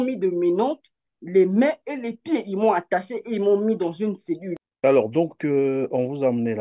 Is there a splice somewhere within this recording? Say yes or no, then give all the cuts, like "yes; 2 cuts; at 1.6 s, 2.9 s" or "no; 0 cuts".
yes; 1 cut; at 4.6 s